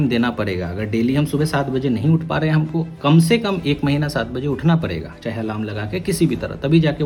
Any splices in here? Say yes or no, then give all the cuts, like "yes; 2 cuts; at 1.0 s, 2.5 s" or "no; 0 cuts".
no; 0 cuts